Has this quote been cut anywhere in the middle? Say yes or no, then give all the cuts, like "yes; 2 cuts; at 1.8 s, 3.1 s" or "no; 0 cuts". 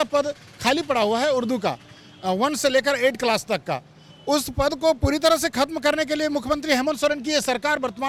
no; 0 cuts